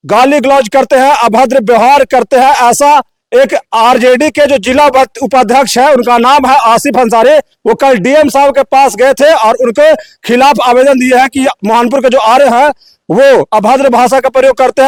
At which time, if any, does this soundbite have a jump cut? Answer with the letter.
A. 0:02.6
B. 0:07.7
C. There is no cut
C